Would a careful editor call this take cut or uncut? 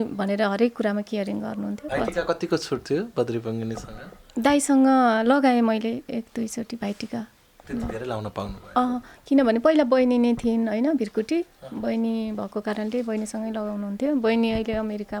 uncut